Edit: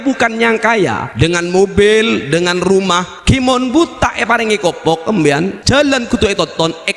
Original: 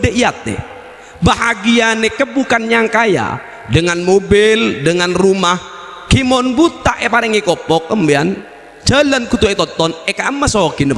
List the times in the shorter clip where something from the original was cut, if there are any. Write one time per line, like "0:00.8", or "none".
0:01.0
0:03.1
0:05.6